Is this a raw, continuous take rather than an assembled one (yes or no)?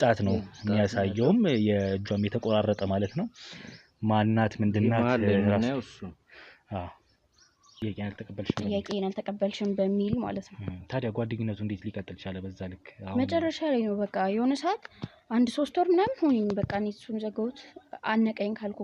no